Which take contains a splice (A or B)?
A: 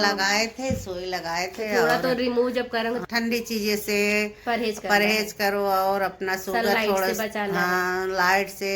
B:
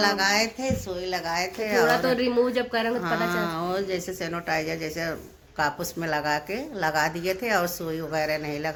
A